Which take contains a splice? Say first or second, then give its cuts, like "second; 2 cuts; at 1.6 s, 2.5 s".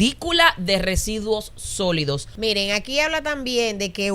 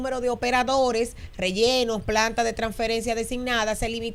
first; 1 cut; at 2.3 s